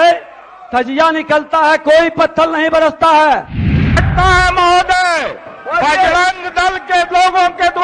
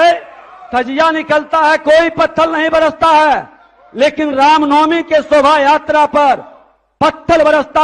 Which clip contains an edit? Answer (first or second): first